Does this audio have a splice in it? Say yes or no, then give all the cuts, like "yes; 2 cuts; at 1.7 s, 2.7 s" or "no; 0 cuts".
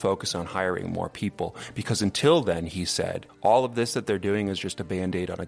yes; 1 cut; at 3.2 s